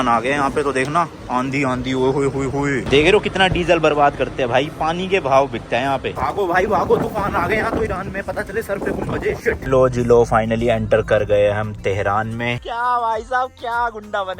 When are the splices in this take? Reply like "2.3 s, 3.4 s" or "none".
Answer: 2.8 s, 6.1 s, 9.6 s, 12.6 s